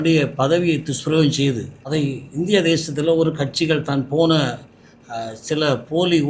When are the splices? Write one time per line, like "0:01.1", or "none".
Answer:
0:01.8